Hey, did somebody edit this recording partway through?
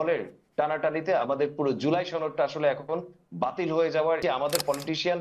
yes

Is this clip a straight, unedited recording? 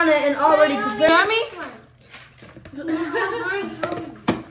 no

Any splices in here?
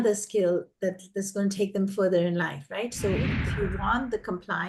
yes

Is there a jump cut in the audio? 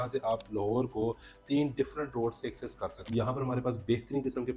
yes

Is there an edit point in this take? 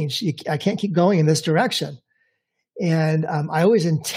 no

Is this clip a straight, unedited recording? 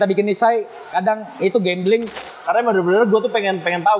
no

